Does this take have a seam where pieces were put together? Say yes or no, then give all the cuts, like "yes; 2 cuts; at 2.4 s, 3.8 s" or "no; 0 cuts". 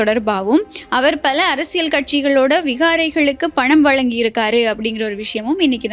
no; 0 cuts